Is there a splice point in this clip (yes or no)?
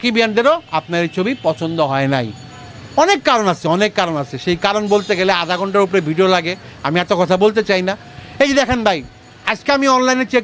no